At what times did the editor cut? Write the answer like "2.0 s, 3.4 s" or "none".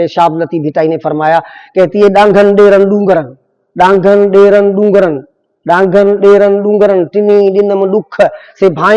none